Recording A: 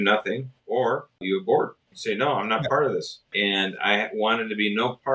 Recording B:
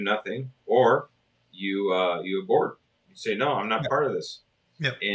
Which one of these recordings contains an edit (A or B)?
A